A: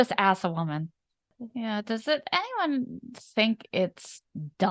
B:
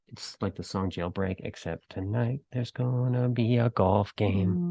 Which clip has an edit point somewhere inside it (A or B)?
A